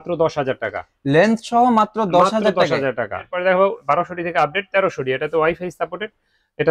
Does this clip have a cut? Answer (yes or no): yes